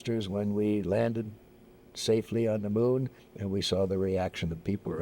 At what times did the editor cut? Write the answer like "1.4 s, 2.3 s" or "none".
none